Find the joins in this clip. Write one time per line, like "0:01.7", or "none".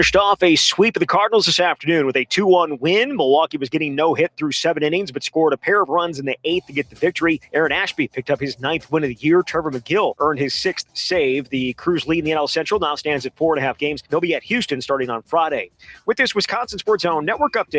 0:07.4
0:10.2
0:14.0
0:16.7